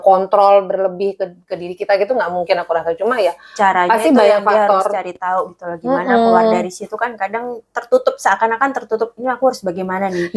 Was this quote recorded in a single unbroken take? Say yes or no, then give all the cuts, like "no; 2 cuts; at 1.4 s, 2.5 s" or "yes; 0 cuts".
yes; 0 cuts